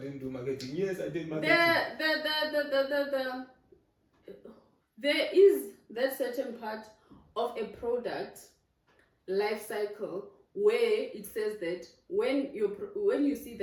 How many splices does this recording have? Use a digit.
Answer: 0